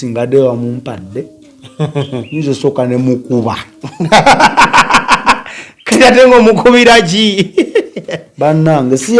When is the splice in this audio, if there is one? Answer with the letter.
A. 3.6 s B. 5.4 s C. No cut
C